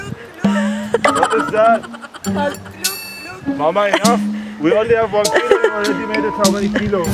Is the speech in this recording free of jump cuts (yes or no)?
yes